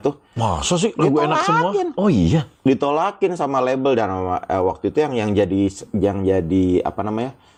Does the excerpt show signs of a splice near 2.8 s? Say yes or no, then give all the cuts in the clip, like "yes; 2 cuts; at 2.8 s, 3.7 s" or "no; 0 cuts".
no; 0 cuts